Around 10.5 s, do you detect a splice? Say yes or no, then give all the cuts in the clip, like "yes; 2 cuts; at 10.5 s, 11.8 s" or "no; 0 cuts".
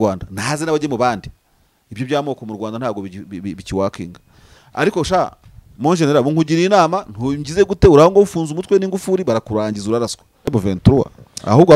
yes; 1 cut; at 10.5 s